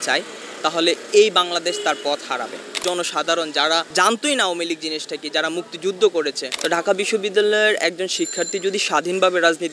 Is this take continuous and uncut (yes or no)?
no